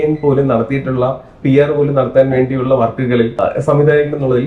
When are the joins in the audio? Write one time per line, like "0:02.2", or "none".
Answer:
0:03.4